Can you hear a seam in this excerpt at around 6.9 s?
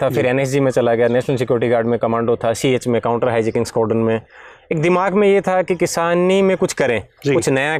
no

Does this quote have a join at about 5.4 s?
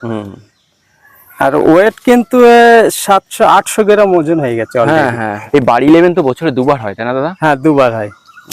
yes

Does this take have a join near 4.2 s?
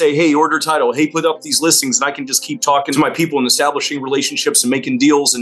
no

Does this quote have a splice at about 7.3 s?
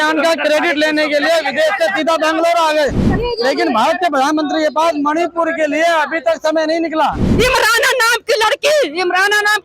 yes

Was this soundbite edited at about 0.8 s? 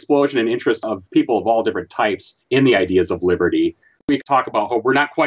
yes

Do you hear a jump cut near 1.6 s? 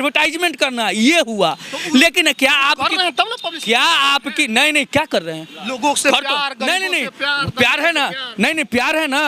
no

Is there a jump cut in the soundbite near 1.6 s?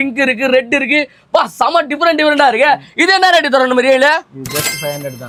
no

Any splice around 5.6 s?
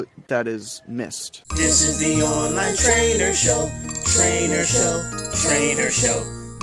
no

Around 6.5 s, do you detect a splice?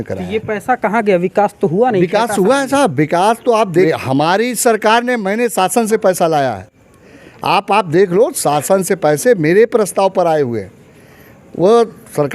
no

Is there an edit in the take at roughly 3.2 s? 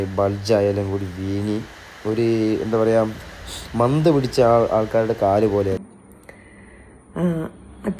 no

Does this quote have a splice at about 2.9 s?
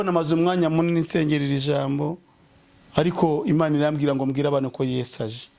no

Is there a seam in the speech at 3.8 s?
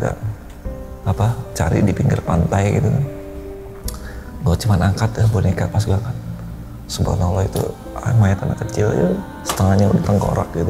no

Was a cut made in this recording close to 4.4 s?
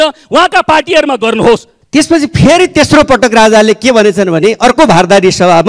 no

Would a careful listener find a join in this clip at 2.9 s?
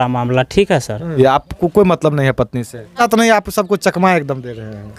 yes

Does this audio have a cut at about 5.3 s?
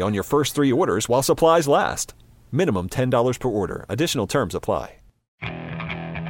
yes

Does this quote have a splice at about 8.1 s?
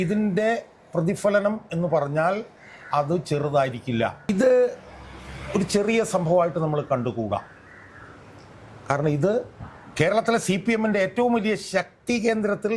no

